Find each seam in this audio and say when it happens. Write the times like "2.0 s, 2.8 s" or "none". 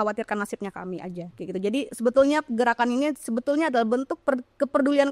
1.3 s